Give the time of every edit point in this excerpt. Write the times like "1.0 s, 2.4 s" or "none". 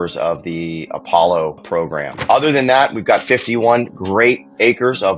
2.1 s